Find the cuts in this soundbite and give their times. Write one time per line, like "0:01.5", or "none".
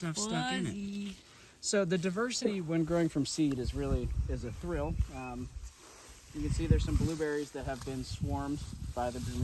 none